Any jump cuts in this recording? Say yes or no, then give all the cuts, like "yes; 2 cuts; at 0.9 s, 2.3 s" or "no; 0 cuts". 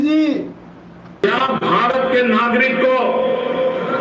yes; 1 cut; at 1.2 s